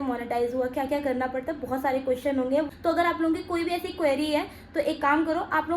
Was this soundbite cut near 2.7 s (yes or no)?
yes